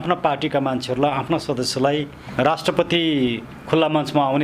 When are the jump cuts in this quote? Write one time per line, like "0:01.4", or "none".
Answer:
0:02.2